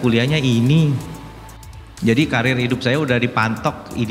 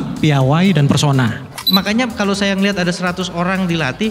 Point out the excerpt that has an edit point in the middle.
second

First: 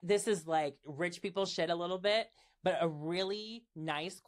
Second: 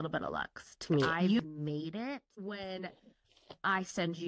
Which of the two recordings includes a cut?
second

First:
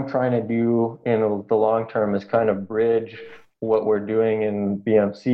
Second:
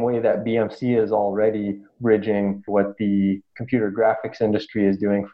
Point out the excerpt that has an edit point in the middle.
second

